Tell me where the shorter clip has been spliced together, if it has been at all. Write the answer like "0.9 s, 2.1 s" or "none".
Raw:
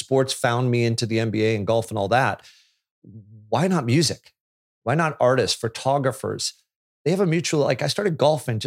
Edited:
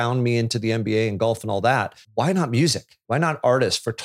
2.0 s, 2.9 s